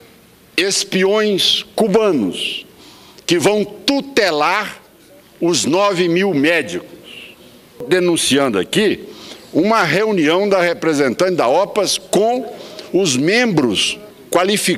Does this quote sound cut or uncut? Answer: cut